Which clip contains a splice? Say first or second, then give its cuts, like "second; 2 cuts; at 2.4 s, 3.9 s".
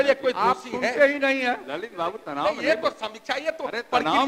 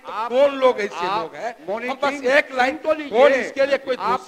first; 1 cut; at 1.6 s